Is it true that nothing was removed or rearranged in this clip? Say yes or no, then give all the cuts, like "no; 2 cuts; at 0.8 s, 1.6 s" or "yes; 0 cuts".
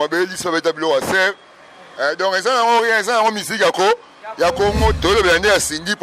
no; 1 cut; at 5.0 s